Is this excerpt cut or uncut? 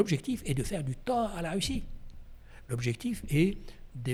uncut